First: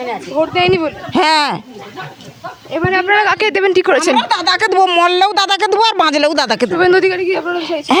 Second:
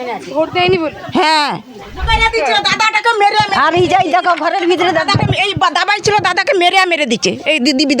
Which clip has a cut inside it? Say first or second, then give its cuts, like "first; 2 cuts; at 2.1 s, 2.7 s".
second; 1 cut; at 2.0 s